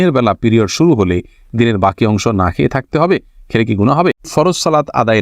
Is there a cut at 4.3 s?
yes; 1 cut; at 4.3 s

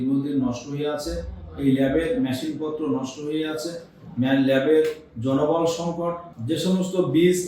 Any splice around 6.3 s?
yes; 1 cut; at 6.3 s

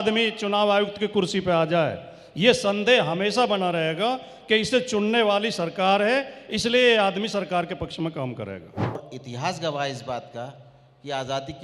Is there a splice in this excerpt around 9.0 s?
yes; 1 cut; at 9.0 s

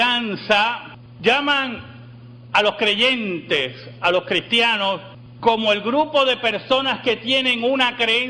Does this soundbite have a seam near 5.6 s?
no; 1 cut; at 6.9 s

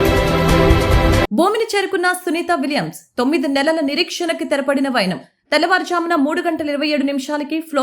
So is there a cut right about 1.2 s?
yes; 1 cut; at 1.2 s

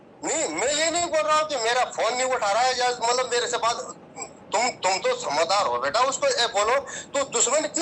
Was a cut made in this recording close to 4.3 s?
no; 0 cuts

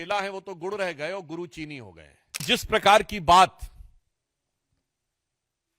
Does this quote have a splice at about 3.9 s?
no; 1 cut; at 2.4 s

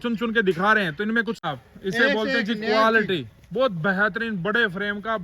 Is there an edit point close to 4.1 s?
no; 1 cut; at 1.4 s

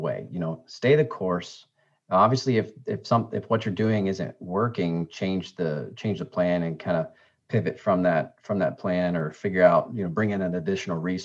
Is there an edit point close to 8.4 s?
no; 0 cuts

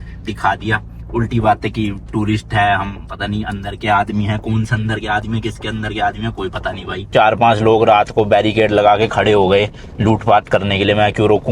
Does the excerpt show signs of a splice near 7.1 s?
yes; 1 cut; at 7.1 s

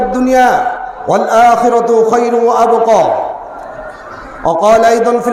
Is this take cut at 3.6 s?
no; 0 cuts

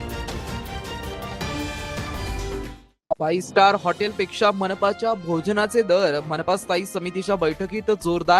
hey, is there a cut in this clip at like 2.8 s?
yes; 1 cut; at 2.8 s

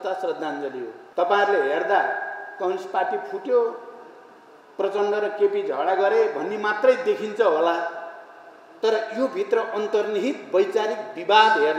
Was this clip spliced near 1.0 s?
yes; 1 cut; at 1.0 s

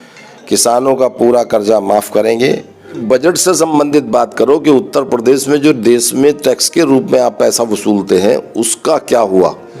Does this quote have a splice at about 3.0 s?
yes; 1 cut; at 3.0 s

